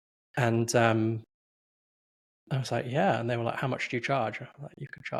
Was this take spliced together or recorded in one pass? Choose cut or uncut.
uncut